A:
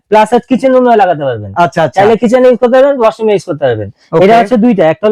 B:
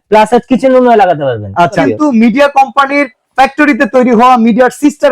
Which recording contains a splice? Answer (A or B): B